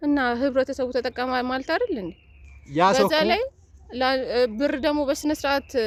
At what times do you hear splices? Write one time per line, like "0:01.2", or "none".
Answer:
none